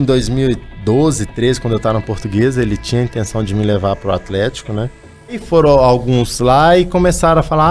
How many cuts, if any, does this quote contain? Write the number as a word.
one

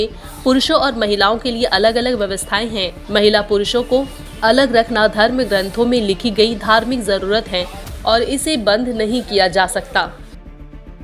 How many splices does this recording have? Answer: one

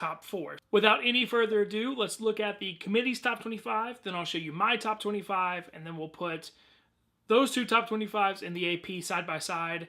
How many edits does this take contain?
one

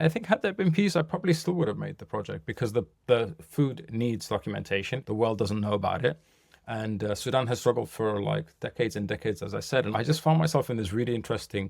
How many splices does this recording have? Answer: three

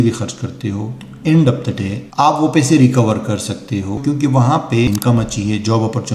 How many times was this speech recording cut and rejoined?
two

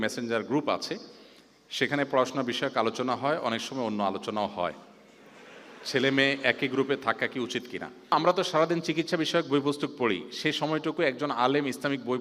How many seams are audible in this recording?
one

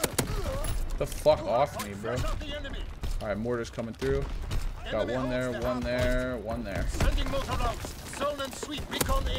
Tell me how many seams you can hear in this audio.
zero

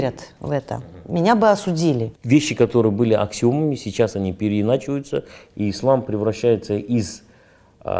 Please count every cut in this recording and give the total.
one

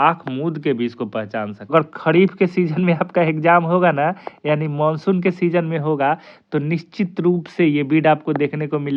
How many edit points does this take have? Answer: one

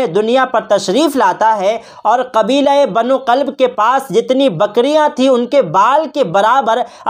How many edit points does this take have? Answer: zero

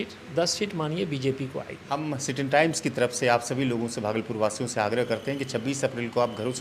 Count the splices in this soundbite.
one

